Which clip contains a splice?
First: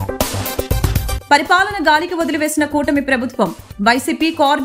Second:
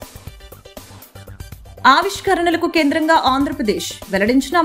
first; 1 cut; at 1.2 s

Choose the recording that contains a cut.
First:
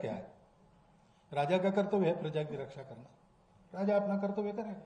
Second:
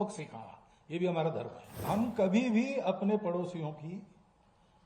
second; 1 cut; at 1.8 s

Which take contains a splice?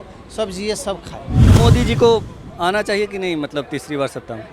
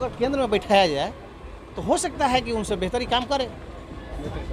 first; 1 cut; at 1.4 s

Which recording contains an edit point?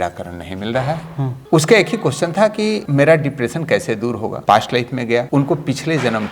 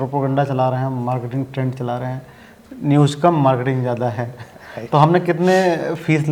first; 4 cuts; at 1.4 s, 2.8 s, 4.4 s, 5.3 s

